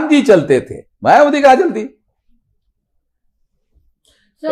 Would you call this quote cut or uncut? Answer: uncut